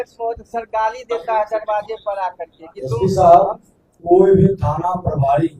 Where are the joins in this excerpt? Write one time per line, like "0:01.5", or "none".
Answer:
0:03.9